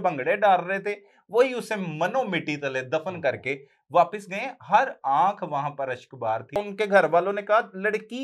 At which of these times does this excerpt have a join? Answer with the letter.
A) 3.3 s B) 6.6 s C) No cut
B